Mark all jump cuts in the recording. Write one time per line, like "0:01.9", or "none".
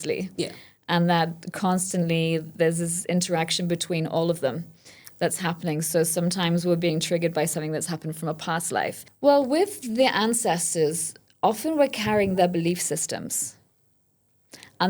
0:09.0

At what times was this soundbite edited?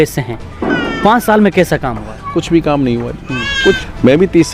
0:03.6

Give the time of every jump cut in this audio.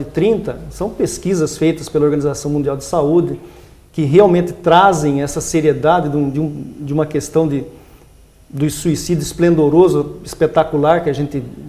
0:08.6

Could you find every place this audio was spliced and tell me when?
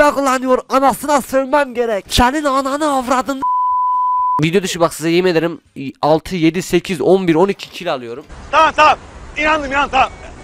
0:04.4

